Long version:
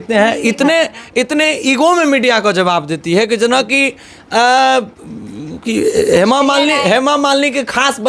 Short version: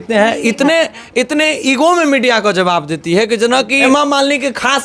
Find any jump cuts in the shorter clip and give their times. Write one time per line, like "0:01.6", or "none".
0:03.8